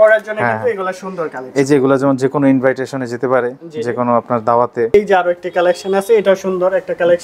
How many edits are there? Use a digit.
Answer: 1